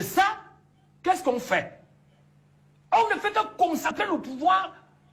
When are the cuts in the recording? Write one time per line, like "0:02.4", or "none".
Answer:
0:03.8